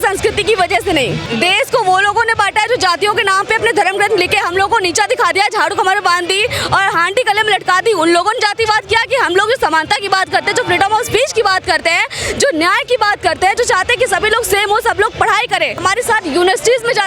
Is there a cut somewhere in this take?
yes; 2 cuts; at 1.2 s, 15.8 s

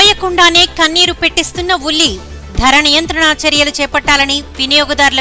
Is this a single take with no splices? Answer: yes; 0 cuts

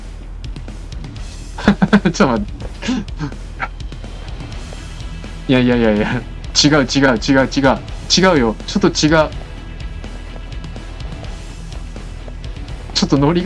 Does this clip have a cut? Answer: no; 0 cuts

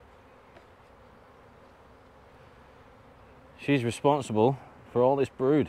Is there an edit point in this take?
no; 0 cuts

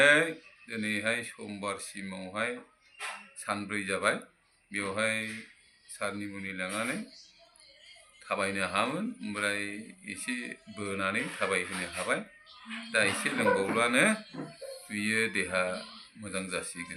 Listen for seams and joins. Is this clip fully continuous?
yes; 0 cuts

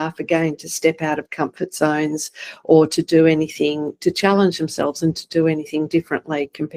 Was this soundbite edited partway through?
no; 0 cuts

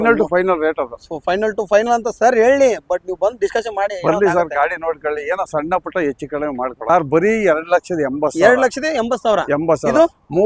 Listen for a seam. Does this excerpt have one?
yes; 1 cut; at 6.8 s

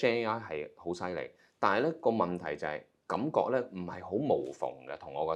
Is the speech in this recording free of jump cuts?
yes; 0 cuts

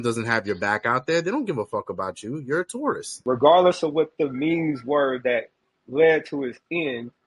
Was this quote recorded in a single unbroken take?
no; 1 cut; at 3.1 s

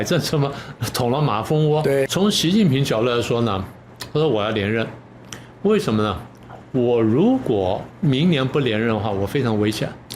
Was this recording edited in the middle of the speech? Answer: yes; 1 cut; at 2.1 s

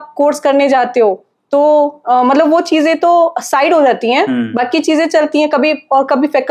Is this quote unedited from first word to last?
yes; 0 cuts

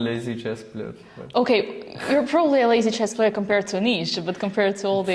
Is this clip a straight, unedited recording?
yes; 0 cuts

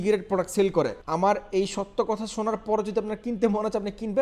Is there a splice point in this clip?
yes; 1 cut; at 1.0 s

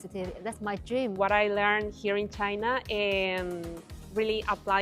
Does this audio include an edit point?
yes; 1 cut; at 1.1 s

